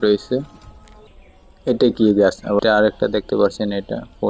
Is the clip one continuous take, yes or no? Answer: no